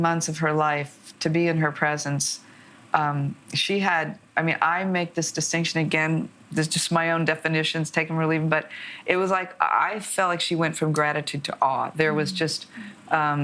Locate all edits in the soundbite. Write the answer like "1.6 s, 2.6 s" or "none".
none